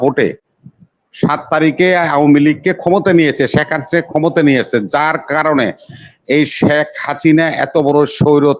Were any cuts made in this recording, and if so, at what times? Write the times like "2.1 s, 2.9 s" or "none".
none